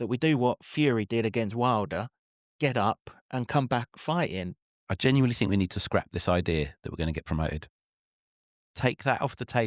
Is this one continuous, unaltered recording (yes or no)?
no